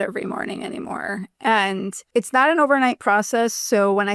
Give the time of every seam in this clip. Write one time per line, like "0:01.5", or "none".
0:02.0